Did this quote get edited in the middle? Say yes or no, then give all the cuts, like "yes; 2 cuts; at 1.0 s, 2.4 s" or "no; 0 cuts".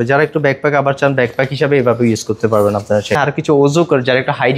yes; 1 cut; at 3.2 s